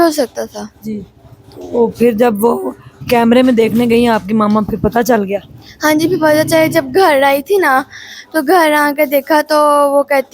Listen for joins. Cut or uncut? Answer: uncut